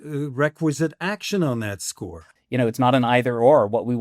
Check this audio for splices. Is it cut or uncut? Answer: cut